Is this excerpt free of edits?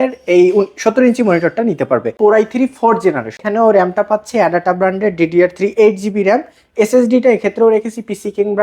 no; 2 cuts; at 2.1 s, 3.4 s

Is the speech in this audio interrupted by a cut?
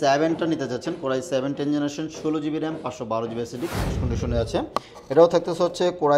yes; 1 cut; at 4.0 s

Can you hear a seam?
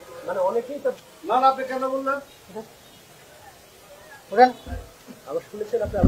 no; 0 cuts

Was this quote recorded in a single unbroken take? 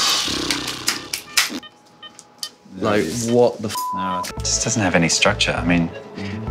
no; 1 cut; at 4.3 s

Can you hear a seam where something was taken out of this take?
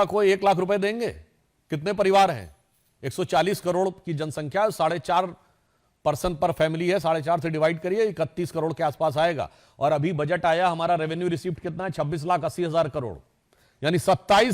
no; 0 cuts

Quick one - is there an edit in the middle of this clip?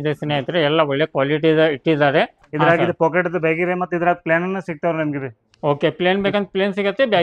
yes; 1 cut; at 2.4 s

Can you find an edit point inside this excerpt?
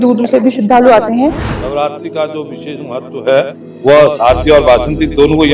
yes; 1 cut; at 1.5 s

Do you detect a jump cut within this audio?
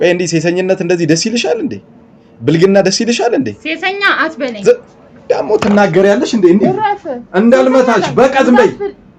no; 0 cuts

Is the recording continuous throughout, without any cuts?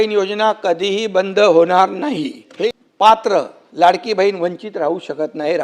no; 1 cut; at 2.5 s

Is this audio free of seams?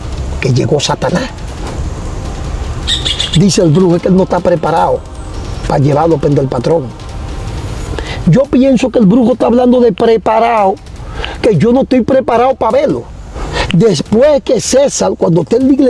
yes; 0 cuts

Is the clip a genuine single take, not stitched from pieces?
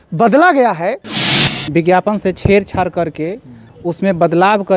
no; 1 cut; at 1.3 s

